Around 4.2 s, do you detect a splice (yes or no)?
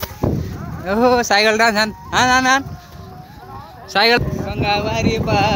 yes